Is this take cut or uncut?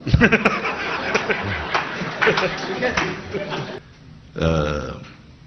cut